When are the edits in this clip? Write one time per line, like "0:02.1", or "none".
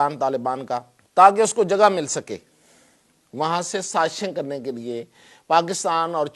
0:01.0